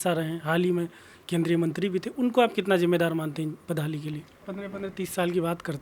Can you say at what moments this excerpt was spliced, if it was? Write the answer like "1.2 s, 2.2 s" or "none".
4.5 s